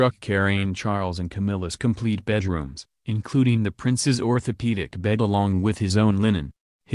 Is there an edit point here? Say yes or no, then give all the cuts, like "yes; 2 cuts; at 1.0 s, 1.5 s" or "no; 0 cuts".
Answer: yes; 2 cuts; at 0.8 s, 4.9 s